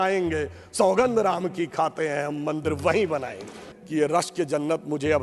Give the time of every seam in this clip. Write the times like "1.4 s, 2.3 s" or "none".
3.7 s